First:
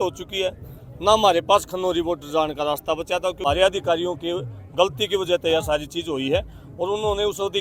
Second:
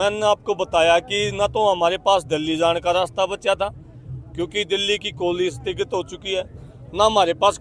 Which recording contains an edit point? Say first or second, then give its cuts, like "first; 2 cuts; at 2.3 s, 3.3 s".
first; 1 cut; at 3.4 s